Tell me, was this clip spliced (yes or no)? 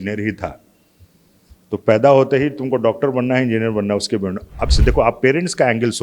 yes